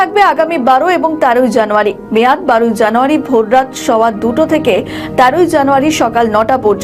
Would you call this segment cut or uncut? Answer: uncut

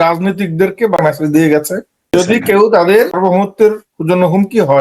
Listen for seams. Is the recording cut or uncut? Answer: cut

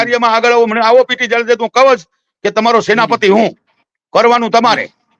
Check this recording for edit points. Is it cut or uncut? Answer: uncut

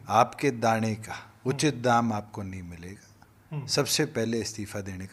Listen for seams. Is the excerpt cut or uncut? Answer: uncut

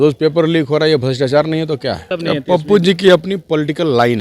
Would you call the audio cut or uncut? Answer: cut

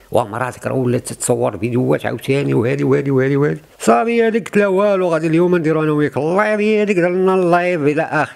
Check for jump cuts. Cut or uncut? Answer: cut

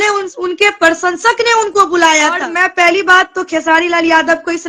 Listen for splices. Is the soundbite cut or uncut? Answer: cut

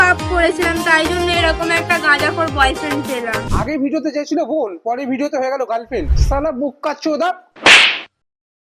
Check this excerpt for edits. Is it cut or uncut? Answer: cut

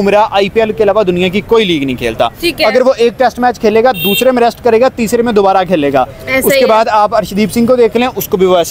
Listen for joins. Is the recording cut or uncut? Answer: uncut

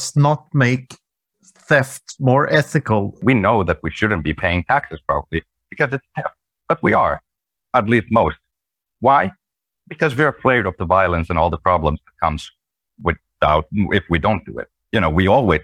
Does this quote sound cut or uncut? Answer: cut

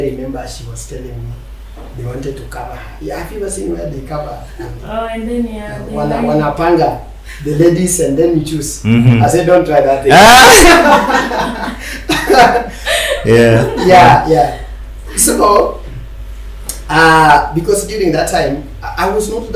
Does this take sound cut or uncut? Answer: uncut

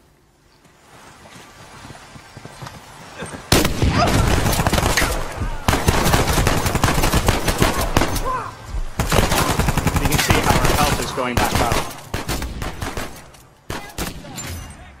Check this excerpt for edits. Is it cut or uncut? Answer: cut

